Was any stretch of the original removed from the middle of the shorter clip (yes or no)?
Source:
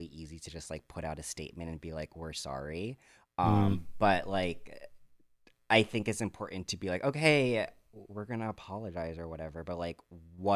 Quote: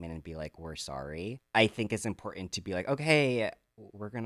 yes